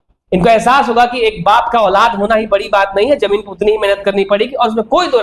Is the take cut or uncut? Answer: uncut